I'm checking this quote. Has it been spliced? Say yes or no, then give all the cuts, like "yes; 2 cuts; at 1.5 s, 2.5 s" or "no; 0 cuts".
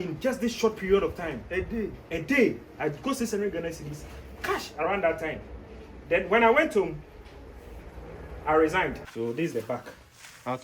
yes; 1 cut; at 9.0 s